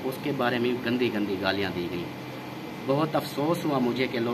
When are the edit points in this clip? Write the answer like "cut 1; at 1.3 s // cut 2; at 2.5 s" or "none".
none